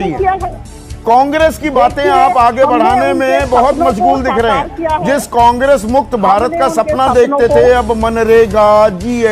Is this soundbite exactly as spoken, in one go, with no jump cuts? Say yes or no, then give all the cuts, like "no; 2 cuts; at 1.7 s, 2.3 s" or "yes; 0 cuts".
yes; 0 cuts